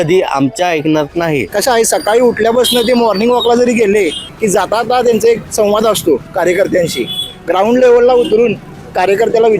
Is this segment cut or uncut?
cut